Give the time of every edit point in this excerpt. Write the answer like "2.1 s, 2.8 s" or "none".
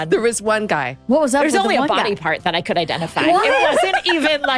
0.9 s